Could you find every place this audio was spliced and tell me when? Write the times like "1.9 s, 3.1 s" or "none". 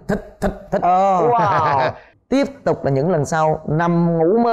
2.1 s